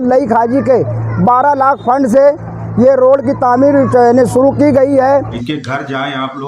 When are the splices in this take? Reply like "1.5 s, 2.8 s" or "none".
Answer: 5.4 s